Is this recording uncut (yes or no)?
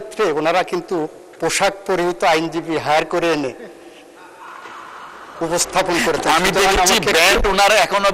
yes